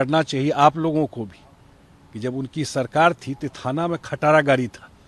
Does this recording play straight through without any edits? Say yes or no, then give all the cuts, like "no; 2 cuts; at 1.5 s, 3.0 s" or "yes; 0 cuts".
yes; 0 cuts